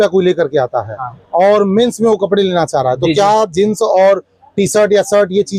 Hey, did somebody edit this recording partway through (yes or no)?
no